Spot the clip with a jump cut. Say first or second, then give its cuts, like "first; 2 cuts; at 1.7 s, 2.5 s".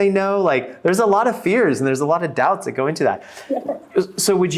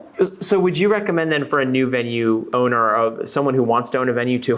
second; 1 cut; at 2.5 s